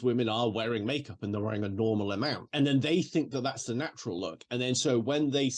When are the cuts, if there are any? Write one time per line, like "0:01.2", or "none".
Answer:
0:02.5